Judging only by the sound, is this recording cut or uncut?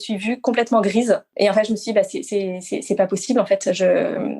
cut